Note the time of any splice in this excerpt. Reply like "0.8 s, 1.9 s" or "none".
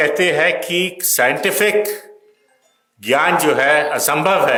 none